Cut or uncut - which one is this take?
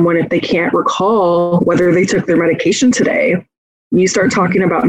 uncut